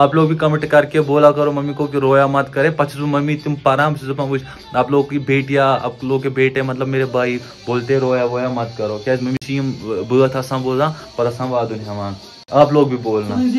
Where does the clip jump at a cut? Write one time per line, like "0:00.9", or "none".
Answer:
none